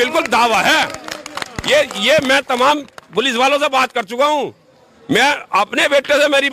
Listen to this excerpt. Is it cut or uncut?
uncut